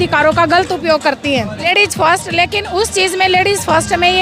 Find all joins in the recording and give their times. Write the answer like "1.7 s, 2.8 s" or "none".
1.7 s